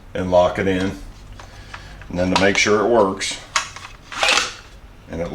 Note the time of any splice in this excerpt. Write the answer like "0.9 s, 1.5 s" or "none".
none